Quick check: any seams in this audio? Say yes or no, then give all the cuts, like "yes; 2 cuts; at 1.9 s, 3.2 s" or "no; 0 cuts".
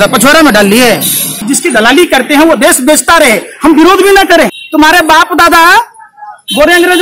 yes; 2 cuts; at 1.5 s, 4.5 s